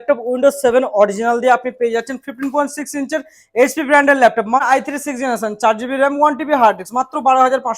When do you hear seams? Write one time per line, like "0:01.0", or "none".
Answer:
0:04.6